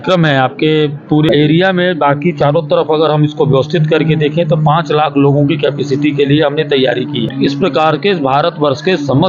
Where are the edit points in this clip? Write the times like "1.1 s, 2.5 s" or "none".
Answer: 1.3 s, 7.3 s